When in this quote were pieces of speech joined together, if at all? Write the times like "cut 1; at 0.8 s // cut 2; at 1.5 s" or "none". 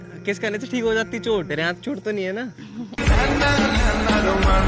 cut 1; at 1.5 s